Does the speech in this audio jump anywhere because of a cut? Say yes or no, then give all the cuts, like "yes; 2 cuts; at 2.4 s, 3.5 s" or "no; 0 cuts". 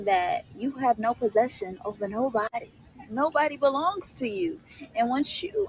yes; 1 cut; at 3.3 s